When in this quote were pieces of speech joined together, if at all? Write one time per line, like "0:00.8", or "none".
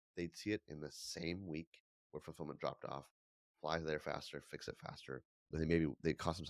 0:05.5